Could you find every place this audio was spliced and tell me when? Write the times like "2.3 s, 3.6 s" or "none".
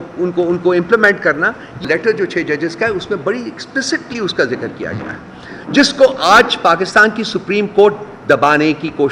1.9 s